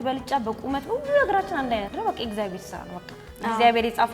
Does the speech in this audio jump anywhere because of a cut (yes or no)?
yes